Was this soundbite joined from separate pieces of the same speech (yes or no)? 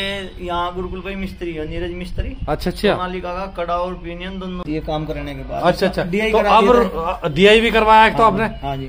yes